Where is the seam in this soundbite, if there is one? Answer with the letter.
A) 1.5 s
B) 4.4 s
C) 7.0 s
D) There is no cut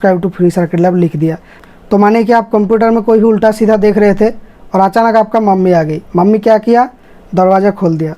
A